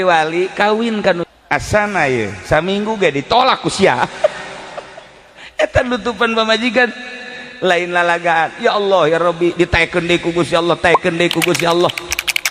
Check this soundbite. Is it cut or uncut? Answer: cut